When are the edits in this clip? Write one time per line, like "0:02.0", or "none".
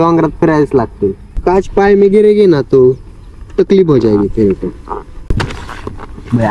0:01.3
0:05.4